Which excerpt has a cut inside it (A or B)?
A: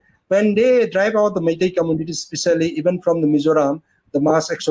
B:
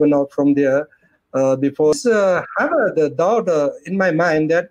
B